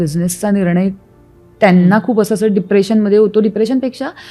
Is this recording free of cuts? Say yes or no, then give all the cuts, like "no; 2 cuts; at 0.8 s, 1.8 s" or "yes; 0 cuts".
yes; 0 cuts